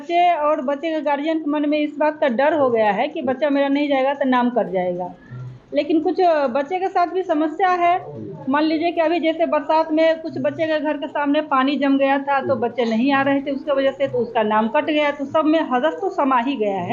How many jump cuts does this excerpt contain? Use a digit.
0